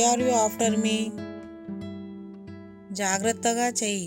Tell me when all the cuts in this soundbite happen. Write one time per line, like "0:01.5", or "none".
0:01.0
0:02.7